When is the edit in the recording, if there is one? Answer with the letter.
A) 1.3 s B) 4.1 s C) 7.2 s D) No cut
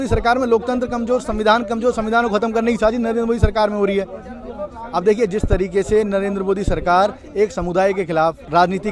D